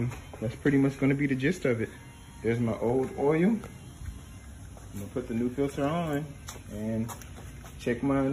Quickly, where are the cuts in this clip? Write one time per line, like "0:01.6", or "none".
none